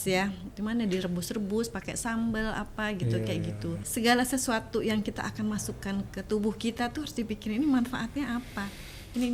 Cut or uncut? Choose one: cut